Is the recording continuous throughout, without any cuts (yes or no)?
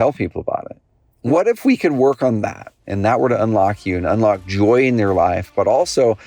no